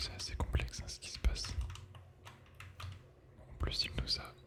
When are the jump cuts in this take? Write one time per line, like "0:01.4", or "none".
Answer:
none